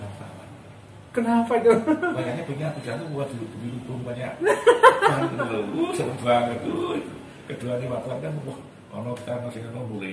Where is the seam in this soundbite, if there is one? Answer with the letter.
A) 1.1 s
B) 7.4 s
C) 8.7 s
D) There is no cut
D